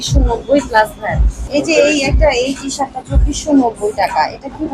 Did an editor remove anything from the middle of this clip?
yes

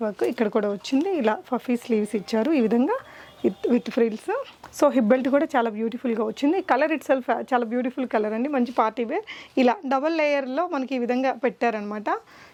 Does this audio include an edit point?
no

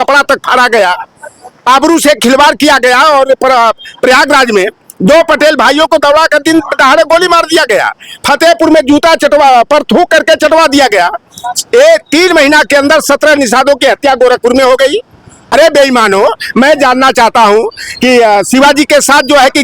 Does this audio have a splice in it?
yes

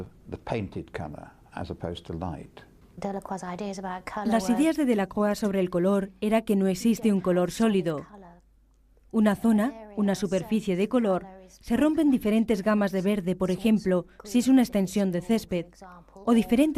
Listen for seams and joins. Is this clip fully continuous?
yes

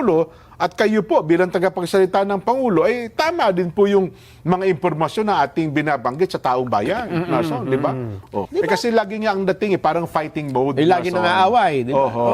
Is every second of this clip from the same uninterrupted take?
no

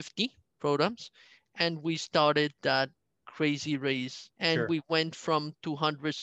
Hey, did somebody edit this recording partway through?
yes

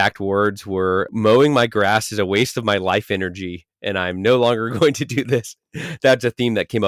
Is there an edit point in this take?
yes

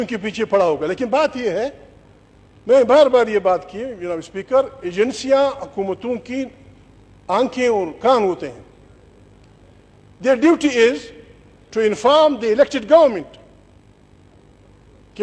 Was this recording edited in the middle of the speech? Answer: no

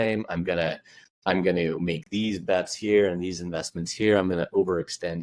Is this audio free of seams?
yes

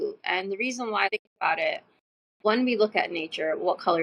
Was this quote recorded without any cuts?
no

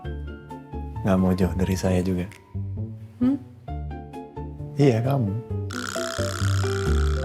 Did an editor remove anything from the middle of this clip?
no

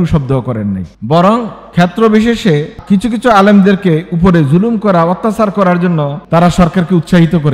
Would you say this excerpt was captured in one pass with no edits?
no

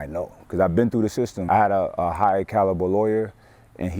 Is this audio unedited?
no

